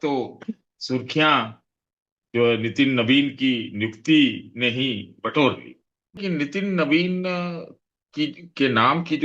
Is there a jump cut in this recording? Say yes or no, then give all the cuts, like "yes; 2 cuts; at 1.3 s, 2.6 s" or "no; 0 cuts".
yes; 1 cut; at 6.2 s